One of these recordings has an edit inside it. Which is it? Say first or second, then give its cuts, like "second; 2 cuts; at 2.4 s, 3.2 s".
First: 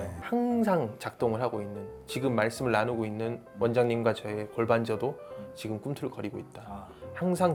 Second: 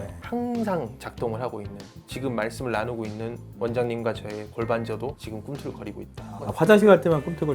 second; 2 cuts; at 5.2 s, 6.5 s